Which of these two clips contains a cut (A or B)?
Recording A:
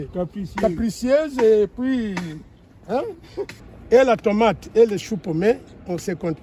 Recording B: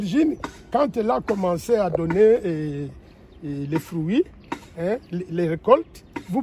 A